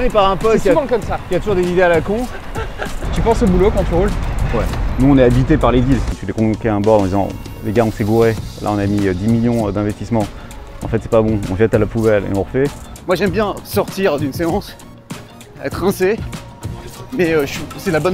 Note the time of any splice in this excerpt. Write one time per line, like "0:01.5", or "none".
0:03.0
0:04.8
0:06.2
0:12.9